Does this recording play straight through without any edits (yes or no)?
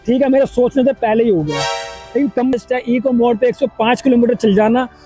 no